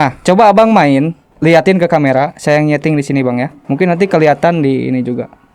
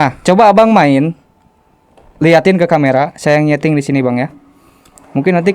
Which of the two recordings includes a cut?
first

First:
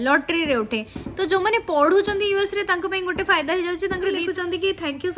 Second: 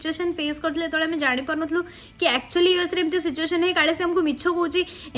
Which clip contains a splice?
first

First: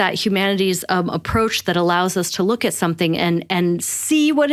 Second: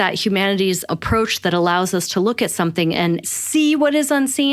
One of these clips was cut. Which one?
second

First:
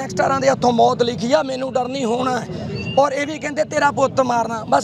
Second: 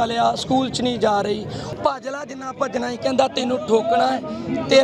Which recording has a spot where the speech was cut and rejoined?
second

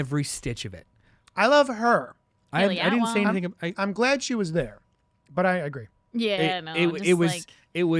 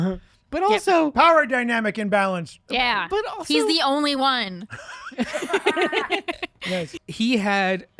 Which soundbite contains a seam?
second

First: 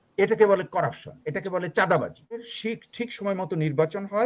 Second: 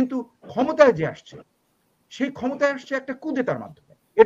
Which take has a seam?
first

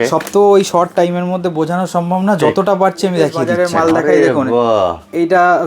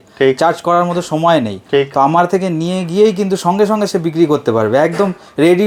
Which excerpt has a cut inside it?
first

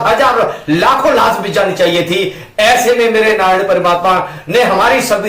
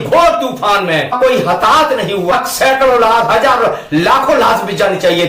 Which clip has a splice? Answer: second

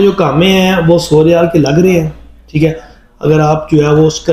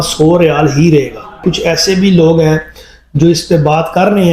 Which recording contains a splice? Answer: second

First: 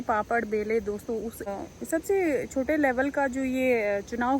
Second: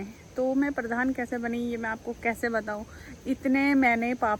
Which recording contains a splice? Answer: first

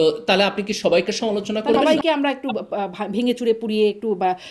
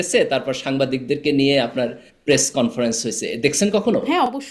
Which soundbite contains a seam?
first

